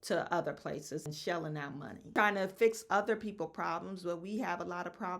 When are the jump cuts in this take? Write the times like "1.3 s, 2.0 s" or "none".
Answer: 1.1 s, 2.2 s

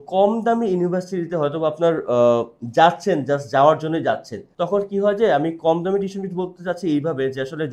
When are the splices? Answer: none

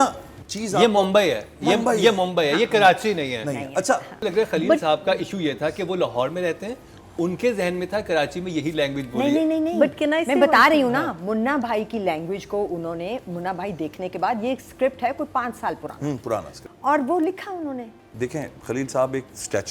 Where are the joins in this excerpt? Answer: 4.2 s, 16.6 s, 18.0 s

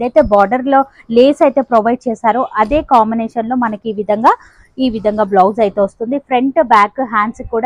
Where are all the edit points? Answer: none

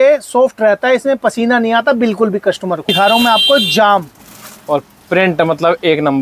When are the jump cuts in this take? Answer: 2.9 s

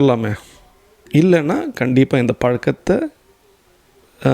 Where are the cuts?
0.9 s

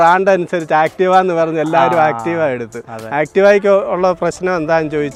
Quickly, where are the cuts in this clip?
none

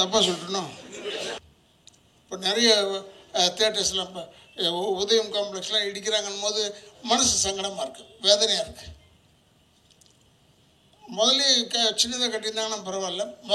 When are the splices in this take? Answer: 1.4 s

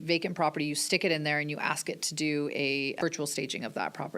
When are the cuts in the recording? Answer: 3.0 s

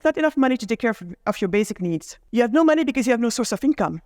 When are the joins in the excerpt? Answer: 2.2 s

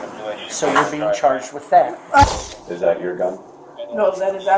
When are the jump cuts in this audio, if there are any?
2.2 s

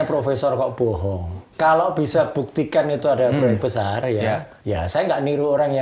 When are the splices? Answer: 1.4 s, 4.5 s

